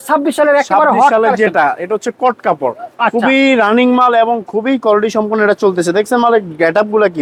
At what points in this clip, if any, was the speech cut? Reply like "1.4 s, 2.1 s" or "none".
none